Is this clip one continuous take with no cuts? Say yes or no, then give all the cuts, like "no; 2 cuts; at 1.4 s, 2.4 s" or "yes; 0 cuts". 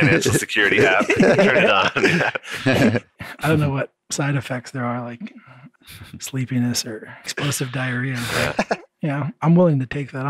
no; 4 cuts; at 3.2 s, 5.7 s, 7.4 s, 8.9 s